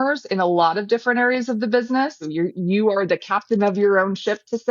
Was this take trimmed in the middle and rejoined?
yes; 1 cut; at 2.3 s

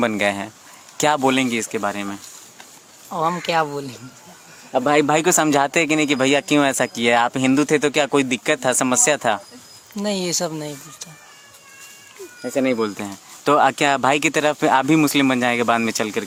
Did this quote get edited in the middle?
no; 0 cuts

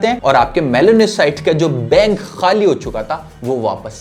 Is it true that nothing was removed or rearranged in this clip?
yes; 0 cuts

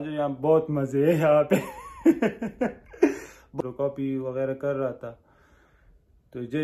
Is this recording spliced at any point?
yes; 1 cut; at 3.6 s

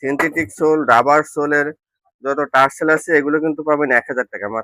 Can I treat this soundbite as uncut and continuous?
yes; 0 cuts

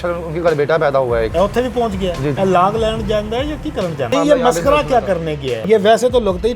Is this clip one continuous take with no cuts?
no; 4 cuts; at 1.3 s, 2.4 s, 4.1 s, 5.6 s

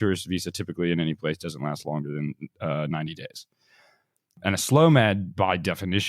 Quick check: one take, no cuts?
no; 1 cut; at 4.4 s

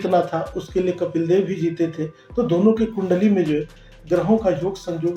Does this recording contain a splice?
no; 0 cuts

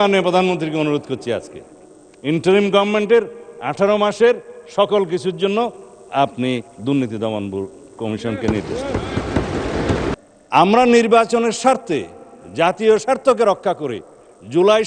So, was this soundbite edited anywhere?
yes; 1 cut; at 10.2 s

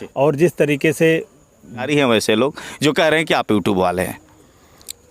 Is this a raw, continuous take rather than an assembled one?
no; 1 cut; at 1.8 s

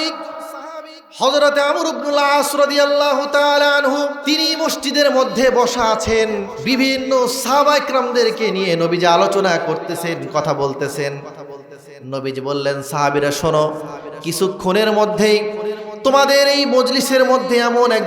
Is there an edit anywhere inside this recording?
yes; 2 cuts; at 4.2 s, 6.5 s

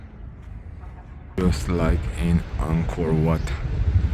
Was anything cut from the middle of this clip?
yes; 1 cut; at 1.4 s

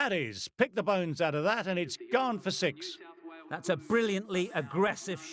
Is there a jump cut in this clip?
no; 0 cuts

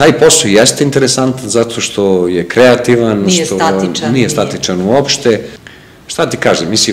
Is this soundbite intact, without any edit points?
no; 1 cut; at 5.6 s

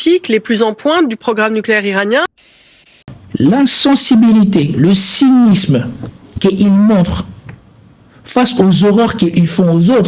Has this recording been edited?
yes; 1 cut; at 2.5 s

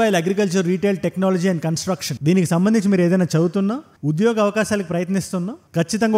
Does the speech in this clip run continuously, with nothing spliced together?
yes; 0 cuts

